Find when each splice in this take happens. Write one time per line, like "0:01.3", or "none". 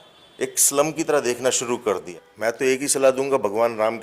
0:02.2